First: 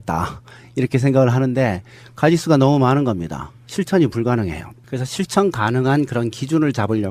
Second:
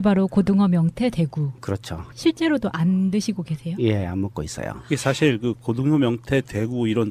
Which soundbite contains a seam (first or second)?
first